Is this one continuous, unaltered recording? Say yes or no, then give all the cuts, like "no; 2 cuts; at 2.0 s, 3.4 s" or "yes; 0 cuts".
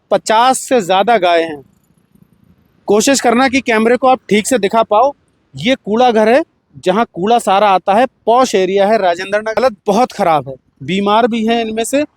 no; 1 cut; at 9.6 s